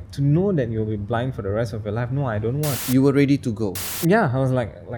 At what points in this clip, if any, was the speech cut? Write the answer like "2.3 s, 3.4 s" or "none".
2.7 s, 3.8 s